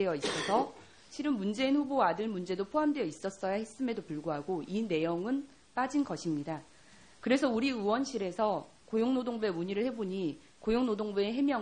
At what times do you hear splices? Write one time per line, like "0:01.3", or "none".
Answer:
none